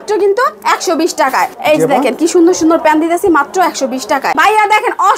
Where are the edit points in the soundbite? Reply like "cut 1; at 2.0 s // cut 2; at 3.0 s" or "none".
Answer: cut 1; at 1.6 s // cut 2; at 4.4 s